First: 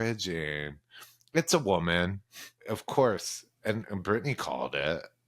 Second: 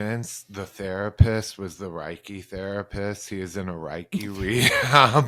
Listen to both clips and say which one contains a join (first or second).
first